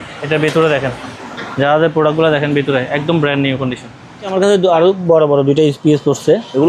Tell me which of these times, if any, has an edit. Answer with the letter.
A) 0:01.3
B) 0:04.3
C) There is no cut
B